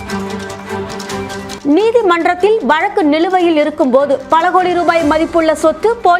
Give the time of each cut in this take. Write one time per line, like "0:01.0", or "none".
0:01.5